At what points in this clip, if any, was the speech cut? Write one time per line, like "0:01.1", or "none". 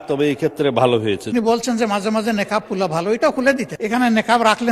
0:01.2
0:03.7